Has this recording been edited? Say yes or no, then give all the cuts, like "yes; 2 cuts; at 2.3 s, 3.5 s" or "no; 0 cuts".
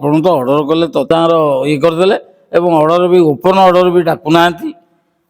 yes; 1 cut; at 1.1 s